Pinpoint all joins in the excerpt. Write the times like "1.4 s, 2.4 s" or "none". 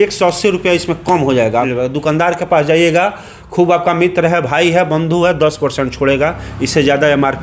1.7 s